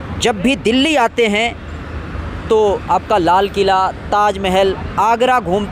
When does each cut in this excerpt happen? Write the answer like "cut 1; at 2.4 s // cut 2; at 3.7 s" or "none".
none